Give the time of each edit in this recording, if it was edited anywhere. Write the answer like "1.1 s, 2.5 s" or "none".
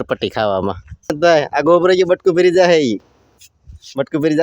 1.1 s